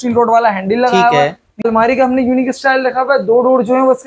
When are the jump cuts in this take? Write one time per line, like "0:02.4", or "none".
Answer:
0:01.6